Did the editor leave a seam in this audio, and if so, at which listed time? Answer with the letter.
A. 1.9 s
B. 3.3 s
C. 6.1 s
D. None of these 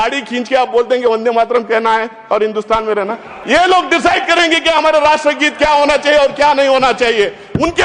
B